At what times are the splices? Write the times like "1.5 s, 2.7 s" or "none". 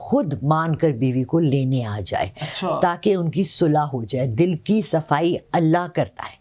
none